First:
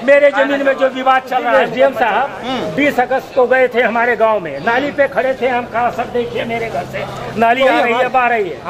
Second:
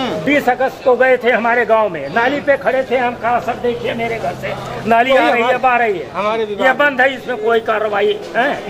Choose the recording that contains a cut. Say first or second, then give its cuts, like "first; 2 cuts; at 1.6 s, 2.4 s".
first; 1 cut; at 1.5 s